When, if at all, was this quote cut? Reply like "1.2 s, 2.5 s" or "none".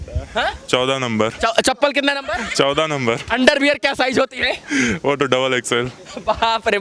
none

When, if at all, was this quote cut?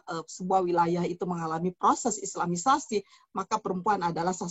none

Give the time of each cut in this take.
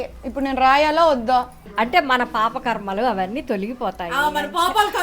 1.6 s

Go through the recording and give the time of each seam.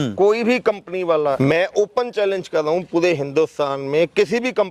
1.4 s

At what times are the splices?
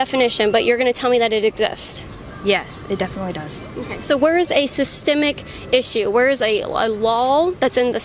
3.1 s, 4.2 s

